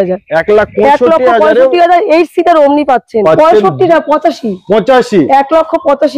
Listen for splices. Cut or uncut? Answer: cut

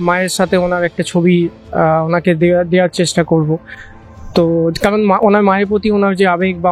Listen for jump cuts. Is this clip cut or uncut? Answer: uncut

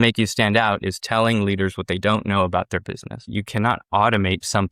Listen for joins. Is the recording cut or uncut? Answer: cut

